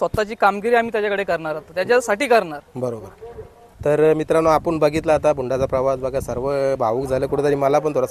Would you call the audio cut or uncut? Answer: uncut